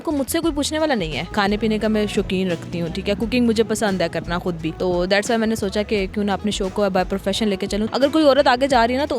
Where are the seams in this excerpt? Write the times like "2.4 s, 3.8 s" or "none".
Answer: 1.2 s, 4.7 s, 7.9 s